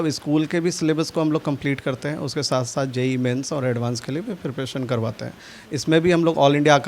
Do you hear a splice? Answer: no; 0 cuts

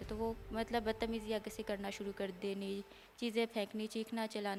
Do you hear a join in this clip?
no; 0 cuts

